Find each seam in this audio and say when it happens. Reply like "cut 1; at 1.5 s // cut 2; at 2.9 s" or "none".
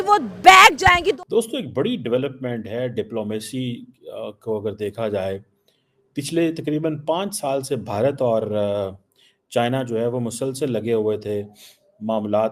cut 1; at 1.2 s